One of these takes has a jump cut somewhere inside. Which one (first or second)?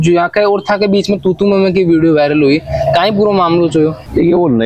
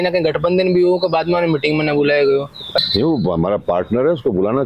second